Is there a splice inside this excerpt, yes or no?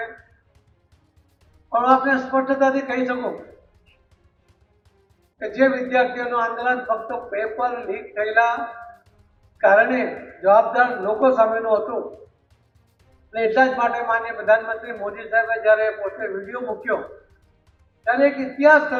no